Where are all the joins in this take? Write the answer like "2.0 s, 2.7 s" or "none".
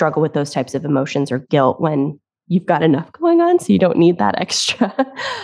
none